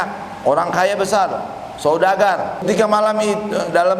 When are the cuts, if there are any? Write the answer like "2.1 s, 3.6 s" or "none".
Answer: 2.6 s

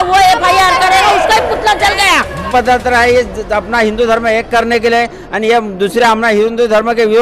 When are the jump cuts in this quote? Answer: 2.5 s

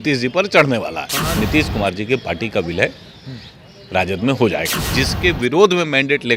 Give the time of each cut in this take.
1.4 s, 4.8 s

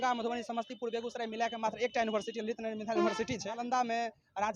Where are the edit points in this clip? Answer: 3.5 s

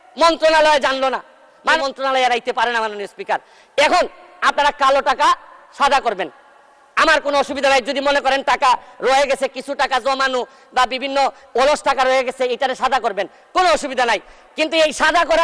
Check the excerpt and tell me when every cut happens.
1.8 s

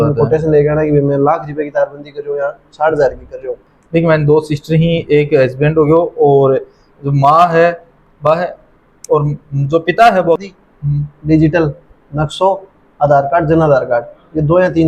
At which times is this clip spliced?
3.6 s, 10.4 s

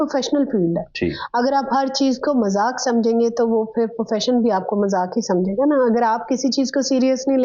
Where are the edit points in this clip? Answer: none

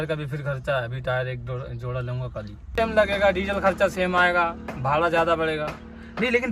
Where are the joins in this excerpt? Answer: 2.7 s

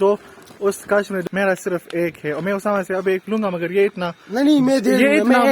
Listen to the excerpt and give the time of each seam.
1.2 s

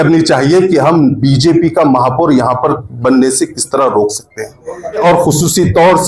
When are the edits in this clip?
5.0 s

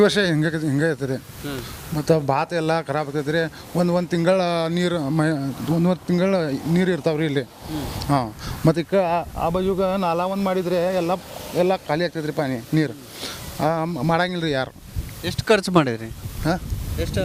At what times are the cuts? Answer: none

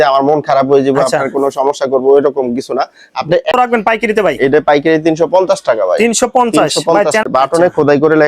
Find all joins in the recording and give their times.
3.5 s, 7.2 s

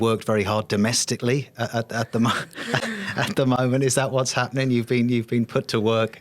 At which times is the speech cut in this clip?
none

